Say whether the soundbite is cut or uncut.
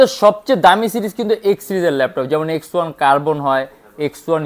uncut